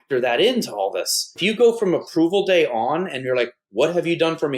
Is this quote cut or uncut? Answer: cut